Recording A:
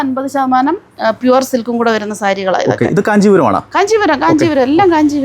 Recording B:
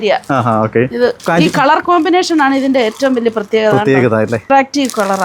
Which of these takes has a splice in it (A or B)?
B